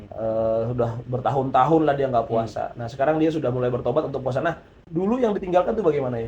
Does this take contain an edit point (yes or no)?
yes